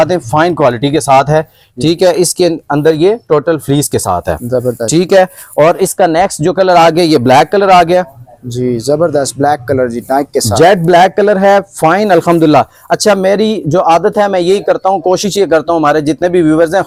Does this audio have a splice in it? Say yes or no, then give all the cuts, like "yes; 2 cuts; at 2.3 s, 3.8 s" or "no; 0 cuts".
no; 0 cuts